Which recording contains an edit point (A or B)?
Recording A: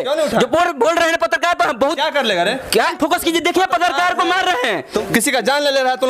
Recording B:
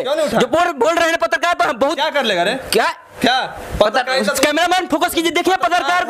A